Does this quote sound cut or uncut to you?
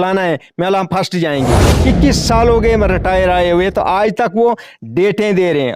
cut